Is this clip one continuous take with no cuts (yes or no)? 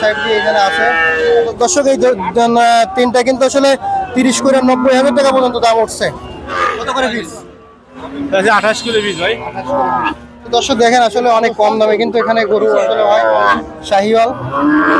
no